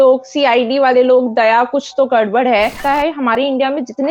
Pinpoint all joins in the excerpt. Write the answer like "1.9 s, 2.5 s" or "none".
3.1 s